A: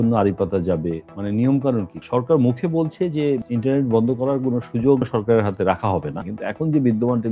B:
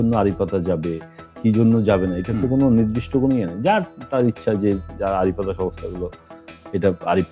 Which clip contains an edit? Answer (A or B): A